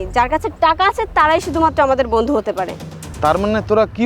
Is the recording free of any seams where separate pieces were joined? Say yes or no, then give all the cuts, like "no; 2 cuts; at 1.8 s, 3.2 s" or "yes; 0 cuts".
yes; 0 cuts